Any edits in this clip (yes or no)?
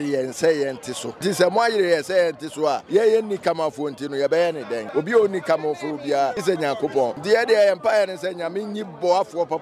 yes